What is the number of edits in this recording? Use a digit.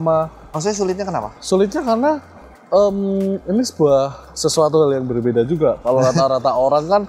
0